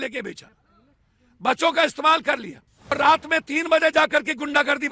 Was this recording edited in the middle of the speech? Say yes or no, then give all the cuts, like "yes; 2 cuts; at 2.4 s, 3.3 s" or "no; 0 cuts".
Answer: yes; 1 cut; at 2.9 s